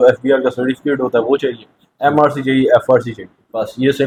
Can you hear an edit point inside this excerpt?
no; 0 cuts

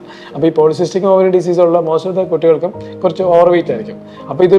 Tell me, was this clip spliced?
no; 0 cuts

